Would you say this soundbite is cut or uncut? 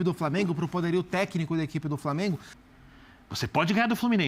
cut